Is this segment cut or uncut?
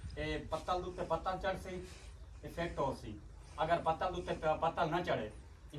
uncut